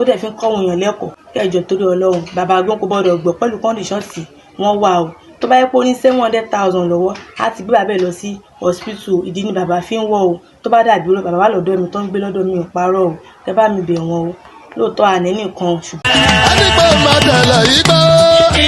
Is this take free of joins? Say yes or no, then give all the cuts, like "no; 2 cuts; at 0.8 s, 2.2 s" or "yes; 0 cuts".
no; 1 cut; at 15.9 s